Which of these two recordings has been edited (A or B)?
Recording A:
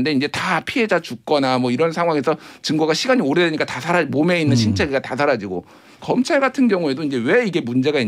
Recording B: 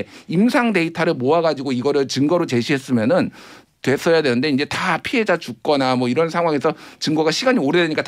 A